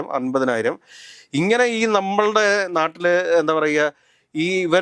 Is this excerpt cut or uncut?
uncut